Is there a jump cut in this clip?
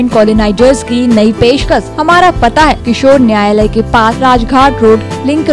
yes; 3 cuts; at 1.9 s, 2.8 s, 4.1 s

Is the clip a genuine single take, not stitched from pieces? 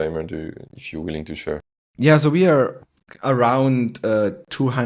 no; 1 cut; at 1.8 s

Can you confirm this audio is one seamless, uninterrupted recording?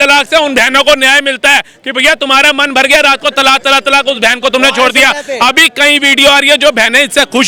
yes; 0 cuts

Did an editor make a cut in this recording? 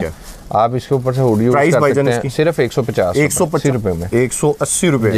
yes; 1 cut; at 3.6 s

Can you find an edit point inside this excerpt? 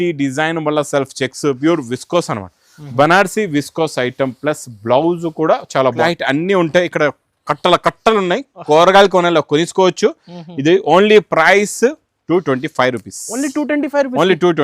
yes; 1 cut; at 6.0 s

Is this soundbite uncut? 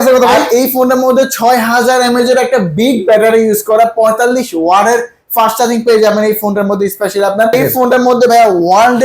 no; 1 cut; at 7.5 s

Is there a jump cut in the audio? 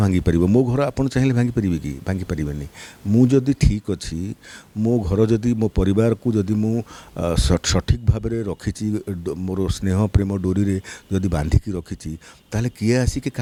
no; 0 cuts

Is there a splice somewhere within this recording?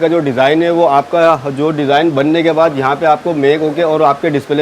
no; 0 cuts

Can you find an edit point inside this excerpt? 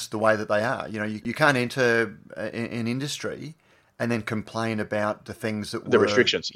yes; 1 cut; at 1.2 s

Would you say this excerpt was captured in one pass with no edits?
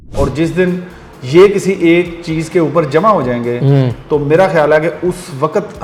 yes; 0 cuts

